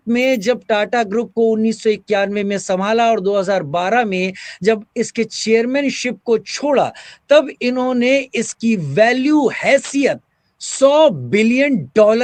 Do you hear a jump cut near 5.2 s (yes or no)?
no